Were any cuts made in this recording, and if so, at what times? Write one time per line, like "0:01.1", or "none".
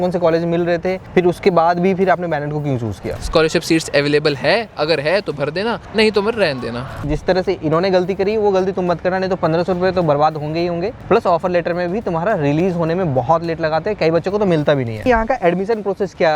0:03.2
0:05.8
0:07.0
0:10.9
0:15.1